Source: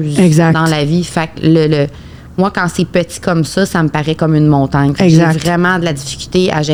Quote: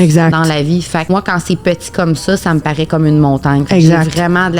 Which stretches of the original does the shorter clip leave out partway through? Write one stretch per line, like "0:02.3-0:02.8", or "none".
0:01.3-0:02.3